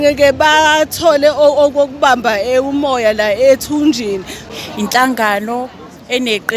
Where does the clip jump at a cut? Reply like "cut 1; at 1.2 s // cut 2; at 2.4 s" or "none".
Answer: cut 1; at 4.5 s